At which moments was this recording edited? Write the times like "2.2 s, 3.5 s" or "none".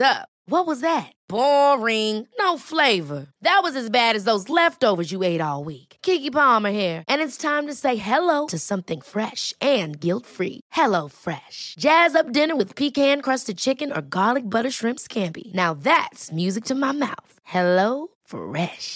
none